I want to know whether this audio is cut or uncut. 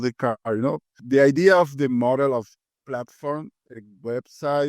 cut